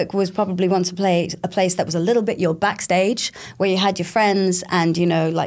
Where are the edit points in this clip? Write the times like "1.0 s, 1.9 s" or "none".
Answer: none